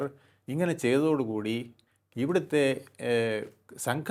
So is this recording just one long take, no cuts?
yes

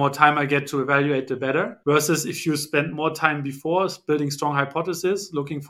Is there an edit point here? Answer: no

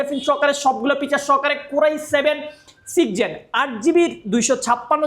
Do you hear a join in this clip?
no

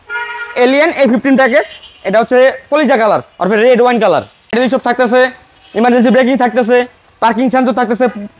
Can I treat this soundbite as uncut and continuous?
no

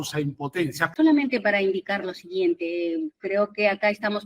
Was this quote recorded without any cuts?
no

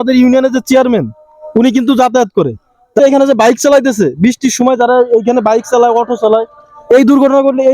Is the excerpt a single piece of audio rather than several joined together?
no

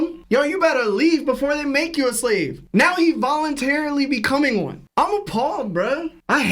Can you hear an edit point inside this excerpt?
no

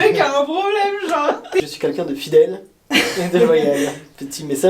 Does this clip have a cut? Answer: yes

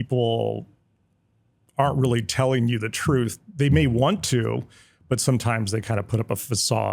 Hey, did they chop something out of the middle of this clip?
no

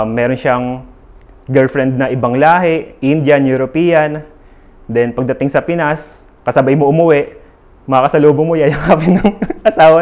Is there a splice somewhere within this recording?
no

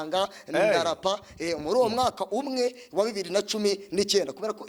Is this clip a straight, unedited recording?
yes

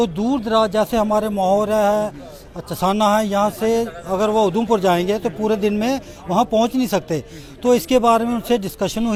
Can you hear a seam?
no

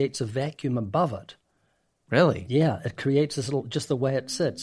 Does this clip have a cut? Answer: no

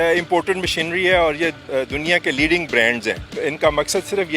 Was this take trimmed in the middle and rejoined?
yes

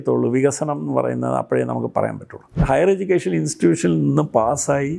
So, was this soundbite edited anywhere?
yes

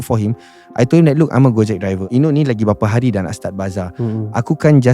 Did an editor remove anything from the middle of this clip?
yes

